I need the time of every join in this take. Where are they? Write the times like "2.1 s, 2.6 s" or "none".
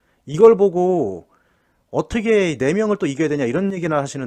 none

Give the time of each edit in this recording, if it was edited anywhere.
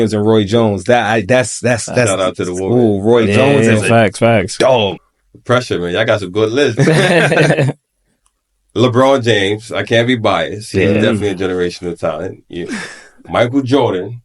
5.1 s

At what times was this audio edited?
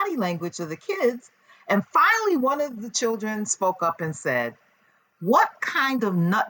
none

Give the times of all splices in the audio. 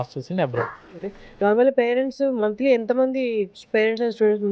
1.0 s

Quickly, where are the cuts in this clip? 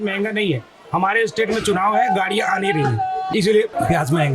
3.3 s

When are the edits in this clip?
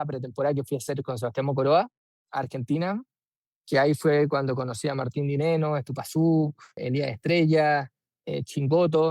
2.2 s, 6.8 s

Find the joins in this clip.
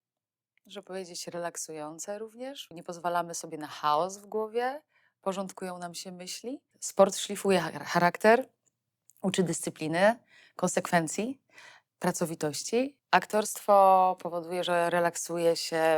2.7 s, 6.7 s, 13.0 s

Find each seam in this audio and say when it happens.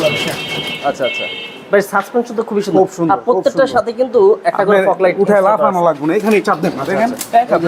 none

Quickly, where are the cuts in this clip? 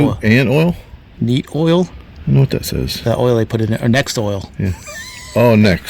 2.0 s

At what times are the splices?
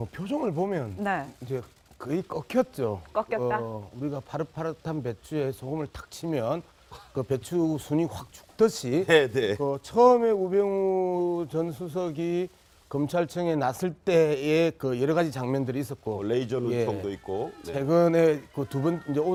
none

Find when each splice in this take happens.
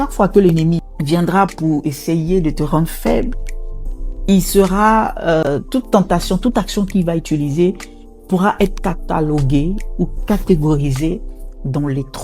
0.9 s

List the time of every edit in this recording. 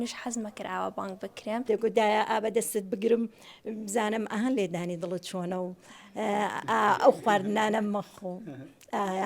1.6 s

